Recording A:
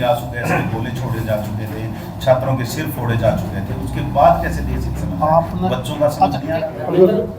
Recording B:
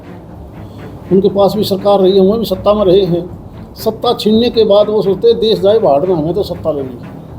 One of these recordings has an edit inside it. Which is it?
A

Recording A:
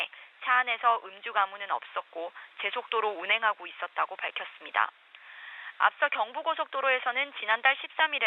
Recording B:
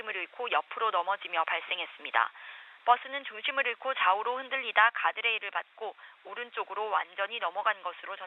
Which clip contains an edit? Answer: B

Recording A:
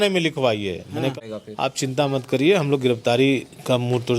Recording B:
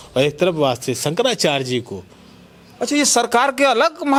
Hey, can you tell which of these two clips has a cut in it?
A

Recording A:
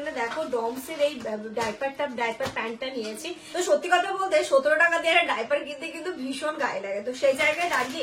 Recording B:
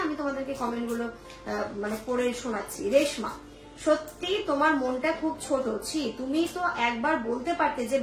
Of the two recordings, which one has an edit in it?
A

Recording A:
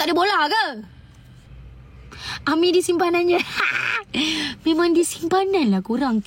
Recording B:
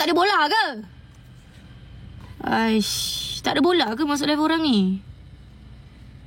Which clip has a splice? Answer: A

